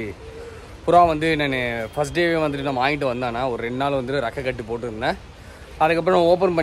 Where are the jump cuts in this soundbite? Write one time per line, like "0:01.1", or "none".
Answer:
none

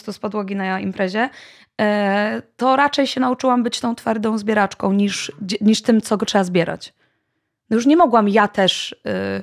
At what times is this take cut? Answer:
none

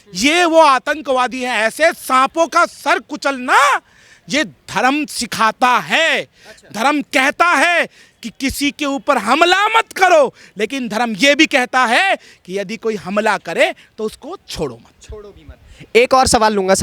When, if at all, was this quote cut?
none

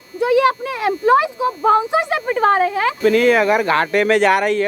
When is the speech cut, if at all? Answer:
0:03.0

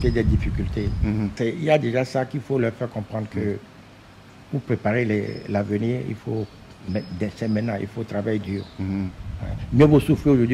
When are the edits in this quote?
0:01.3

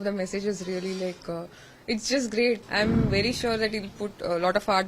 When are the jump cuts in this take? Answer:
0:02.6

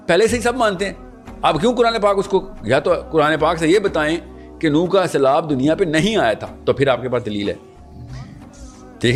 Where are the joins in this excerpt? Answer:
none

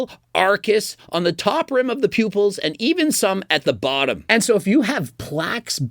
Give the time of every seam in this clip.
0:04.2

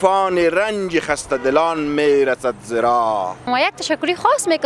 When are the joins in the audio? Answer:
0:03.4

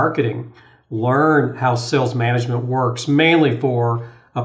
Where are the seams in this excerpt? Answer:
none

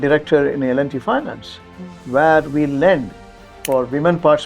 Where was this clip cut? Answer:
0:03.5

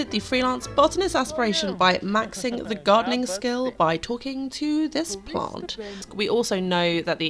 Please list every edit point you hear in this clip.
0:06.1

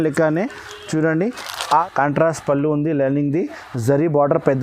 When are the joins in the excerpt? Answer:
0:01.8

